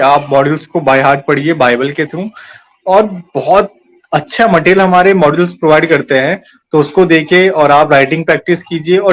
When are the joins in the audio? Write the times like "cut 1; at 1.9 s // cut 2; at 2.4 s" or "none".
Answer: none